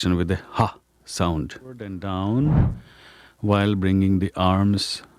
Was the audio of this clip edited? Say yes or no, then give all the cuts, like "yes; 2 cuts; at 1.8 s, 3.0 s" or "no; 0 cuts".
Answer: yes; 1 cut; at 1.9 s